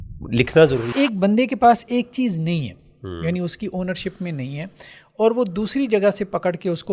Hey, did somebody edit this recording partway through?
yes; 1 cut; at 0.9 s

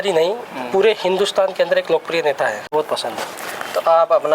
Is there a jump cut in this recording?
yes; 1 cut; at 2.7 s

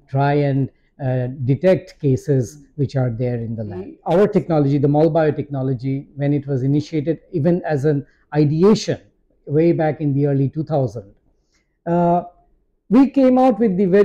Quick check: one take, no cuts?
no; 1 cut; at 3.9 s

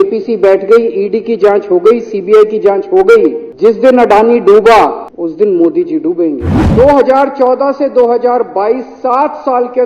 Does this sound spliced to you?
yes; 3 cuts; at 3.5 s, 5.1 s, 6.5 s

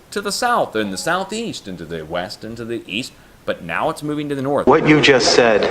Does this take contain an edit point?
yes; 2 cuts; at 3.3 s, 4.7 s

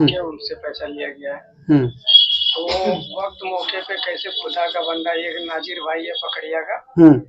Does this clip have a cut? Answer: no; 0 cuts

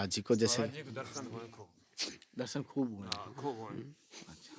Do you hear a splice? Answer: no; 0 cuts

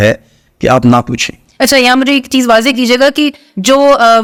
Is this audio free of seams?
yes; 0 cuts

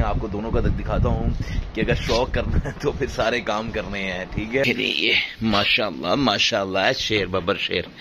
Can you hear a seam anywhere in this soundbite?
yes; 1 cut; at 4.6 s

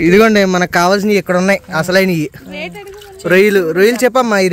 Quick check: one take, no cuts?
yes; 0 cuts

